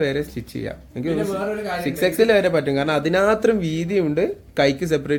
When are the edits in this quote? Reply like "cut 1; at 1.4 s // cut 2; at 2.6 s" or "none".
none